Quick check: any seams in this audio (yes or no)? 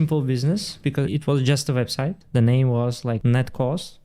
yes